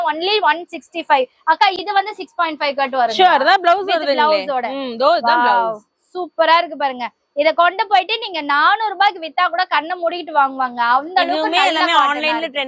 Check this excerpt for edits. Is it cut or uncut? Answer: uncut